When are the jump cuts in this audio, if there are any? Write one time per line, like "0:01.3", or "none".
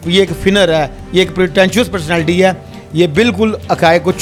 none